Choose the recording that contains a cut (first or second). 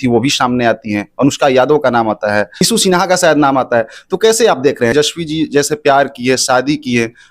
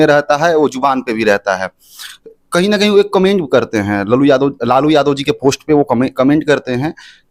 first